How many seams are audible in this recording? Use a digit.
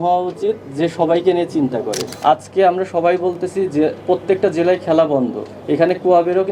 1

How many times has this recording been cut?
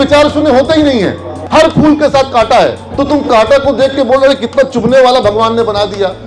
1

